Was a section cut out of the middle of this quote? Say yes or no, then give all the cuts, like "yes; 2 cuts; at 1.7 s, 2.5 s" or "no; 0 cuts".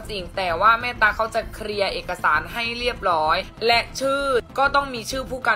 yes; 2 cuts; at 3.5 s, 4.5 s